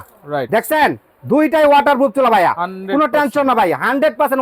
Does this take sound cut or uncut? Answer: uncut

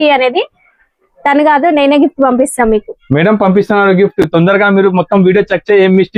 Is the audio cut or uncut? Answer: uncut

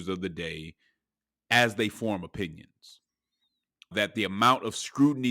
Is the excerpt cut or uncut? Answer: cut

